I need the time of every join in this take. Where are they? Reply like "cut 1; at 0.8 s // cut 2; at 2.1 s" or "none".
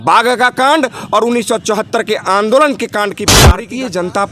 cut 1; at 3.4 s